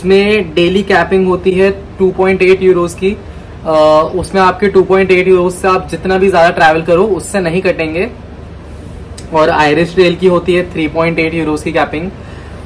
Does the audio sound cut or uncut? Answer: uncut